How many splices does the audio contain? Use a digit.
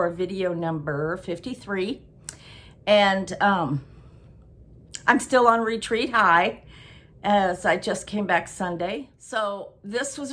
1